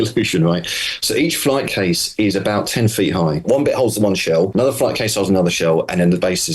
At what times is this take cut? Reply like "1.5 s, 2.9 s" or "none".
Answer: 3.4 s, 4.5 s